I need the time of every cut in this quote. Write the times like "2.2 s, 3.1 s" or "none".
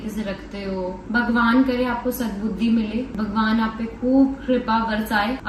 none